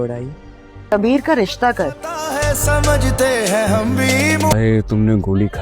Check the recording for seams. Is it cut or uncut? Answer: cut